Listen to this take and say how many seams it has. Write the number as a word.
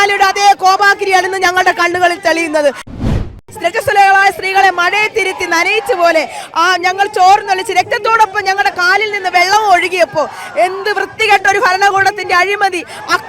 one